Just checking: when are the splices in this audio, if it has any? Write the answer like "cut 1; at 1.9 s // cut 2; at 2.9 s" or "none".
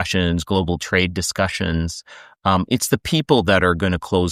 none

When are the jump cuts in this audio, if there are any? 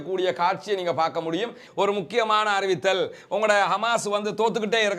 cut 1; at 1.6 s

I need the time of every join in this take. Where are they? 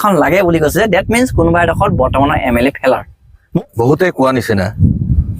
cut 1; at 3.6 s

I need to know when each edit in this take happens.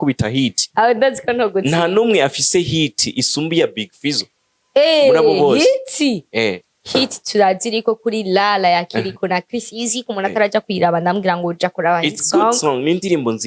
cut 1; at 6.7 s

